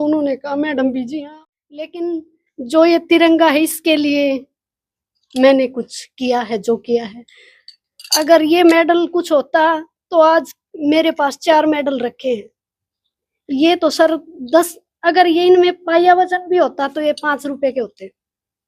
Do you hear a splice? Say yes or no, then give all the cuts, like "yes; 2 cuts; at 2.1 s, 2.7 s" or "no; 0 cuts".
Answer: yes; 1 cut; at 1.1 s